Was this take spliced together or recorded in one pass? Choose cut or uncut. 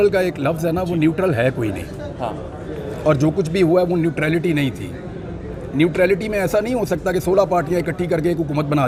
uncut